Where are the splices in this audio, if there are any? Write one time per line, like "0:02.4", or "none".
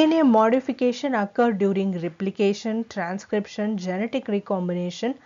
0:03.5